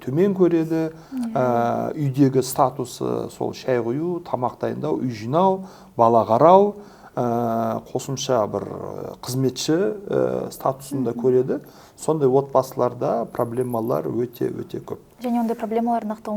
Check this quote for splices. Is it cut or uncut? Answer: uncut